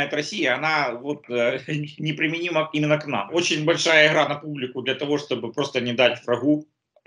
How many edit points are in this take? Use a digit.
1